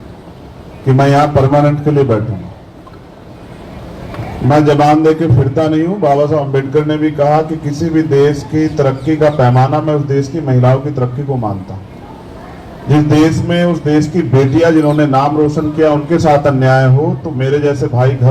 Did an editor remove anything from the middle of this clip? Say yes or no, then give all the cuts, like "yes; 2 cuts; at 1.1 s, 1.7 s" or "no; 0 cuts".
no; 0 cuts